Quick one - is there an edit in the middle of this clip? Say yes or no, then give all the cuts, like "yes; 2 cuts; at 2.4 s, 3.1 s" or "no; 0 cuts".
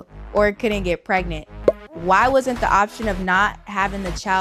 no; 0 cuts